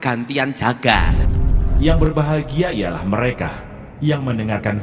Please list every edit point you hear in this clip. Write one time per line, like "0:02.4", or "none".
0:01.2